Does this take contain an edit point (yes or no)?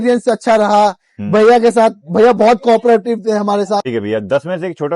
yes